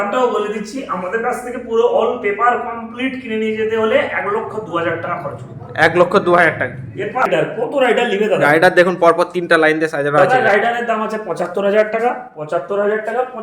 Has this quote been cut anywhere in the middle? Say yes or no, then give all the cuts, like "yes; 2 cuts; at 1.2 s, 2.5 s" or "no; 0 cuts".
yes; 1 cut; at 7.3 s